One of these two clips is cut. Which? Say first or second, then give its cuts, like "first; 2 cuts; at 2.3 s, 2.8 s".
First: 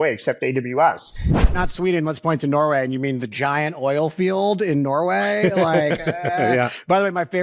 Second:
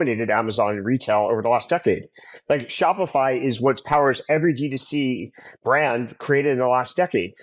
first; 1 cut; at 1.4 s